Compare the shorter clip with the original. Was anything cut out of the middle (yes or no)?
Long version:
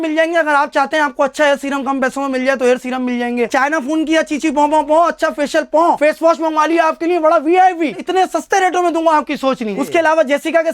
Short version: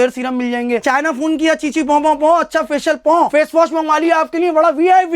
no